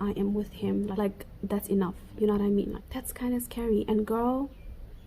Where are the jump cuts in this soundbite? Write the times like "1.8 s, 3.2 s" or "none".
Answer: 1.0 s, 2.8 s